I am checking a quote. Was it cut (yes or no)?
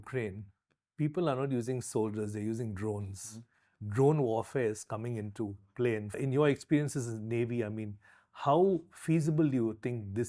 yes